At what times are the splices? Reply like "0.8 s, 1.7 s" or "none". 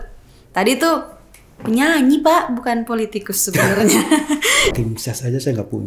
4.7 s